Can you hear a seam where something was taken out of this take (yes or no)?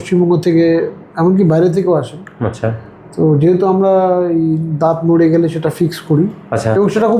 no